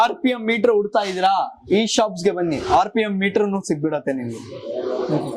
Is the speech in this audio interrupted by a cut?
no; 0 cuts

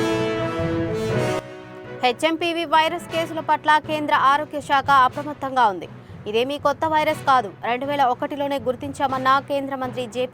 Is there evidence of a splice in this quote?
yes; 1 cut; at 1.4 s

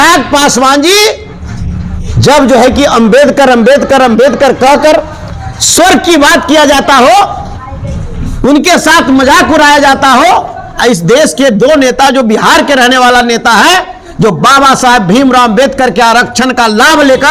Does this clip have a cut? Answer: no; 0 cuts

